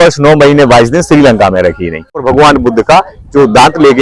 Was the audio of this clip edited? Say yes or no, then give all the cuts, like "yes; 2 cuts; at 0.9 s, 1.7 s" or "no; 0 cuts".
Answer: yes; 1 cut; at 2.2 s